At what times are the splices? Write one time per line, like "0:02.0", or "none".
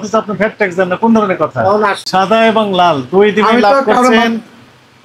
0:02.0